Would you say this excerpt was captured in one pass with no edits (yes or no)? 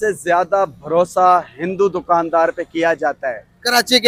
yes